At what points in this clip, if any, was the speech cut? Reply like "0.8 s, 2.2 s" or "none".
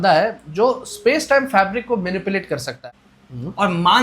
2.7 s